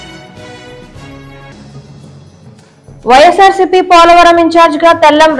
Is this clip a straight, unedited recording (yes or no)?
yes